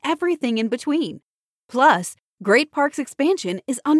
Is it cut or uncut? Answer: uncut